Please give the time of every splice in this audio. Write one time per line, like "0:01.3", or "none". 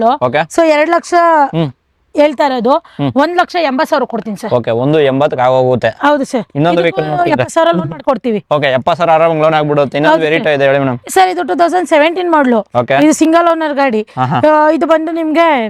none